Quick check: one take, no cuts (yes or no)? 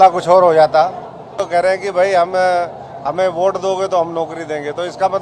no